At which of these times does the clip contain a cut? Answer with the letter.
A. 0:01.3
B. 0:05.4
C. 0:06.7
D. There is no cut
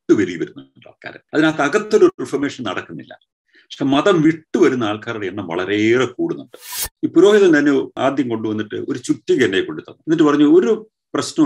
C